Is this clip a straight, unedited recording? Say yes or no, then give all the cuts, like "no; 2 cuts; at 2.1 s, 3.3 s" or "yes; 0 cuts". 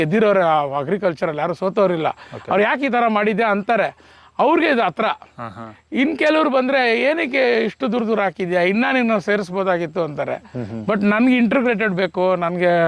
yes; 0 cuts